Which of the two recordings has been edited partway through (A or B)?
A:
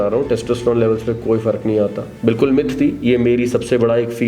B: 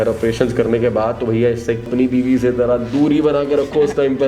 B